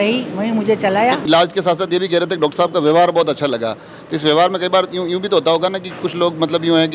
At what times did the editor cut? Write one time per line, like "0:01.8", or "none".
0:01.2